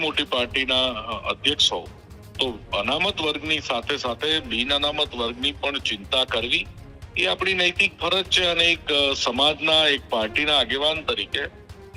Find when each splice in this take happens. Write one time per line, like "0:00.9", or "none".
none